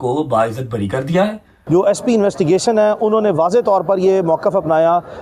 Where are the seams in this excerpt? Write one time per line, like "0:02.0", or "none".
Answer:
0:01.5